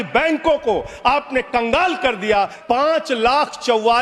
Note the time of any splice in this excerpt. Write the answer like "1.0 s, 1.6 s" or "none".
2.6 s

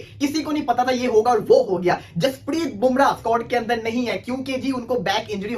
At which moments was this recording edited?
3.2 s

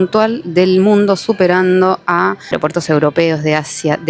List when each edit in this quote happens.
2.5 s

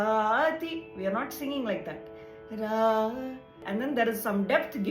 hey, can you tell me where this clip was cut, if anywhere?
3.6 s

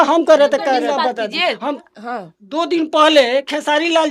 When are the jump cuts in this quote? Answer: 0.8 s, 1.8 s

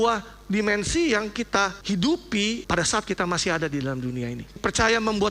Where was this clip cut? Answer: 1.8 s, 2.6 s, 4.6 s

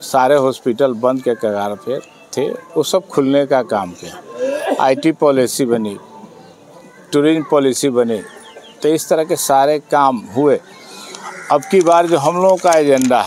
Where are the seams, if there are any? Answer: none

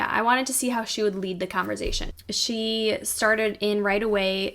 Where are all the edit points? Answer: 2.1 s

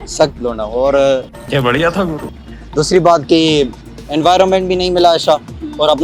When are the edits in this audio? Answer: none

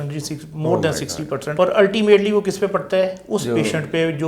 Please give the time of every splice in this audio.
1.5 s

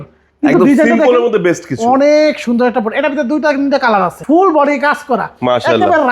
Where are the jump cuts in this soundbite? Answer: 4.2 s

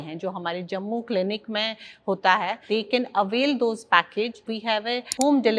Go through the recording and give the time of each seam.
2.6 s, 4.5 s

